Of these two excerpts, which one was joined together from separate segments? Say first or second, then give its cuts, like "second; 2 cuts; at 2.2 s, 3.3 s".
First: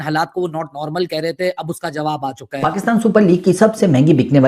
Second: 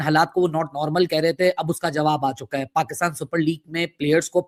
first; 1 cut; at 2.5 s